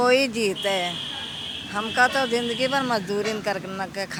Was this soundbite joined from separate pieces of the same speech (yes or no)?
no